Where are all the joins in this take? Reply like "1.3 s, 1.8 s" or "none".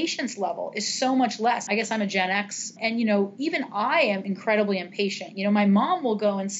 1.6 s, 2.8 s, 4.3 s